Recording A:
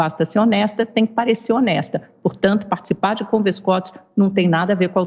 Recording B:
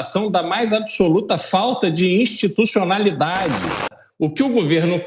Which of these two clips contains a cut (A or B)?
B